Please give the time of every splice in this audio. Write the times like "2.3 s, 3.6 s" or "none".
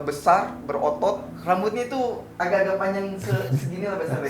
1.3 s